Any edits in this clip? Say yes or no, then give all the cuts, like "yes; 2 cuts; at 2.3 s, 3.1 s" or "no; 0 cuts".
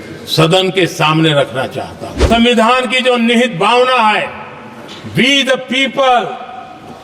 yes; 1 cut; at 2.2 s